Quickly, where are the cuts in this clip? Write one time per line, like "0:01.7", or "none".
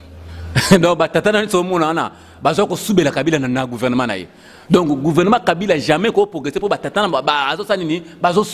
none